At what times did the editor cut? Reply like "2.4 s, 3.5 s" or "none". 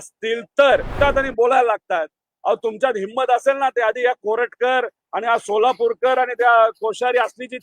0.9 s